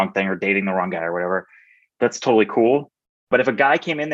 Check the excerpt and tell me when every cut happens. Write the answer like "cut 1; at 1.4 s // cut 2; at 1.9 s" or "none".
cut 1; at 1.8 s // cut 2; at 3.3 s

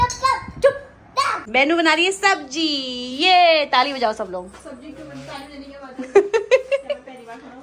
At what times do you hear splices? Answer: cut 1; at 1.4 s

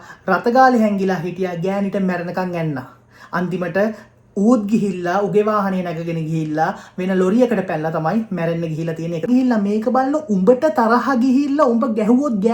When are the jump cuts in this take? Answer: cut 1; at 9.3 s

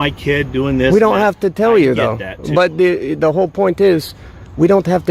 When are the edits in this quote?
none

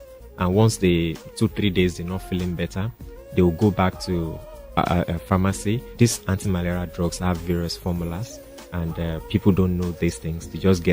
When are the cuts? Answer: cut 1; at 5.9 s

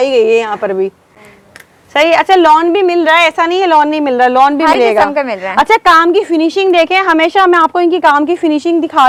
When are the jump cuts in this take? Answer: none

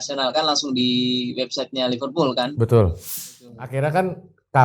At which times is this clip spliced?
cut 1; at 3.7 s

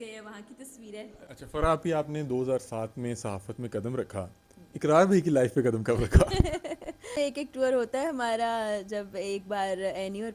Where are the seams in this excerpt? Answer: cut 1; at 1.2 s // cut 2; at 7.1 s

